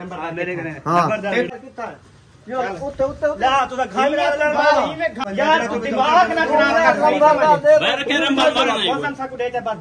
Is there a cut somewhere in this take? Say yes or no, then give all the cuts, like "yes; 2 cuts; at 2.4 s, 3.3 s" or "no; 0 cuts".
yes; 2 cuts; at 1.5 s, 5.2 s